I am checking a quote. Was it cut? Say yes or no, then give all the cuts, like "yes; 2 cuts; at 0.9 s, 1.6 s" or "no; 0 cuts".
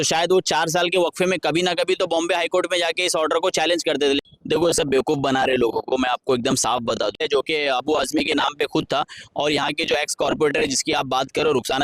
yes; 2 cuts; at 4.3 s, 7.2 s